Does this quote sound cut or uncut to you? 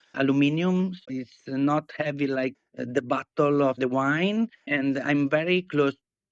cut